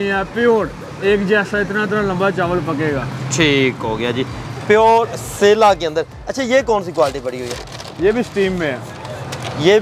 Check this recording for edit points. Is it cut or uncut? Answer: uncut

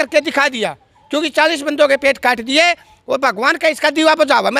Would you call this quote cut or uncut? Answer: uncut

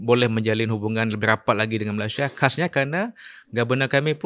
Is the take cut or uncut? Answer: uncut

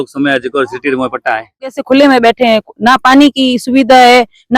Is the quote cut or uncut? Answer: cut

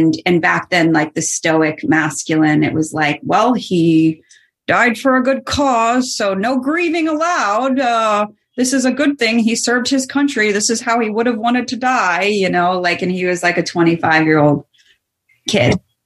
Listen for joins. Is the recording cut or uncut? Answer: uncut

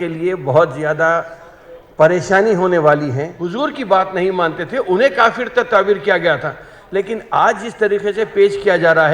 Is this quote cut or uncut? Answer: cut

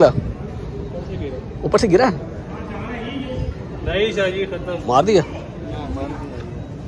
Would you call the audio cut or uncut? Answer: uncut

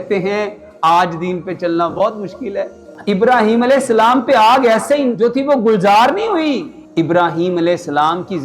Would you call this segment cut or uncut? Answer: cut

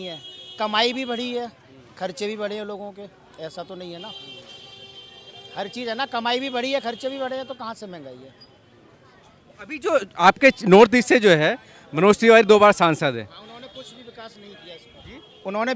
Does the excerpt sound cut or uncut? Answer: uncut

